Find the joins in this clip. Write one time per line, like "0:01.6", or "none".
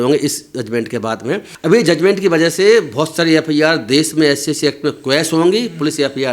0:01.5